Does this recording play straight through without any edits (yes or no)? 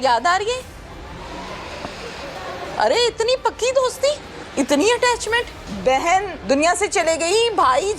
no